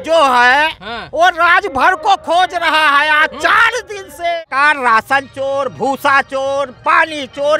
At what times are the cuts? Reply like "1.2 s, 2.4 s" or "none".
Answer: 4.4 s